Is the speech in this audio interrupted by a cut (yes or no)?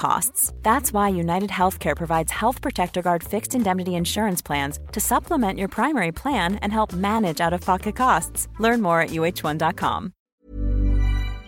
yes